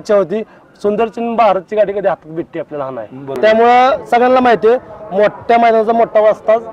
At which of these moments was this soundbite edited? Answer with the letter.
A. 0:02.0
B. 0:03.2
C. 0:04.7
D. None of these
B